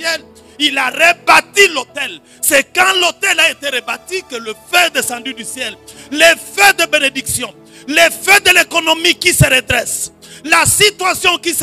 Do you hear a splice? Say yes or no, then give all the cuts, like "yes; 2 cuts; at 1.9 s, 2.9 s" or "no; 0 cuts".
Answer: no; 0 cuts